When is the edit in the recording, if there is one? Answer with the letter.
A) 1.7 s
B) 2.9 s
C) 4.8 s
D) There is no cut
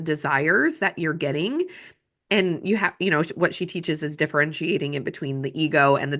D